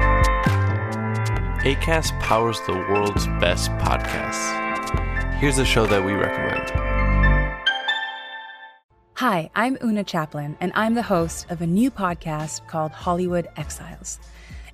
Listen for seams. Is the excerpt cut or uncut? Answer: cut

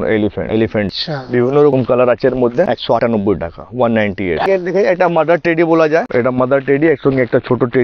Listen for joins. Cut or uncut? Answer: cut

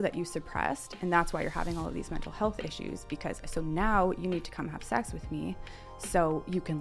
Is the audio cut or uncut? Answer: uncut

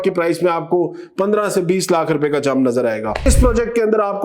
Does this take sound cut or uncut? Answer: cut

